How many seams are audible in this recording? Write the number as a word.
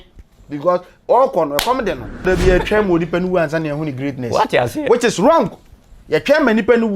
one